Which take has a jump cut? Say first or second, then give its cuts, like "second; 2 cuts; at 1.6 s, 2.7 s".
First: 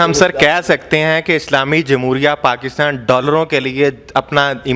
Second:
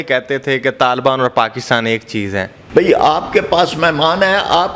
second; 1 cut; at 2.5 s